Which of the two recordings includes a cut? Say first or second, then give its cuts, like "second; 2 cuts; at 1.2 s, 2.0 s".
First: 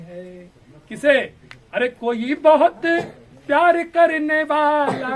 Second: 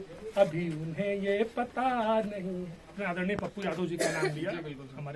second; 1 cut; at 2.8 s